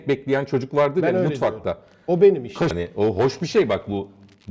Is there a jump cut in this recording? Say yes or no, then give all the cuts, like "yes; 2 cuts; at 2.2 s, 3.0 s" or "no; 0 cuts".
yes; 1 cut; at 2.8 s